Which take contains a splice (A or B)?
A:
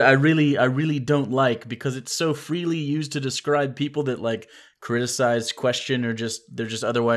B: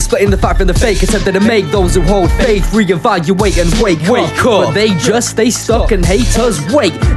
B